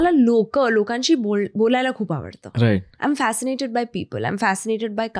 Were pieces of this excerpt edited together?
no; 0 cuts

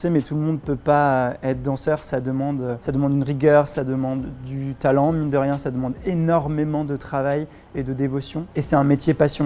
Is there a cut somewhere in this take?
no; 0 cuts

